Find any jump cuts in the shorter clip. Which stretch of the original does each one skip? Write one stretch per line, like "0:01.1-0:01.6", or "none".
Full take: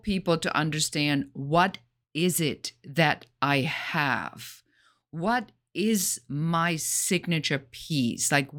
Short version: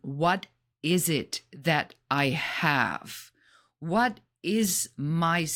none